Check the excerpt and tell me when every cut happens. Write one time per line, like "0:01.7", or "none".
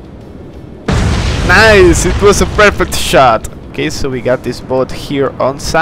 0:03.7